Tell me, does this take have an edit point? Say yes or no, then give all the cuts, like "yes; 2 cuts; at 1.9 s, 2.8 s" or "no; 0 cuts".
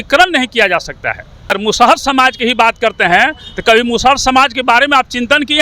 yes; 1 cut; at 1.6 s